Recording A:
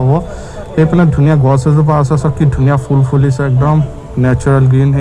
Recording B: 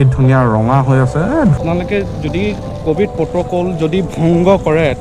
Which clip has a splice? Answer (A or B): B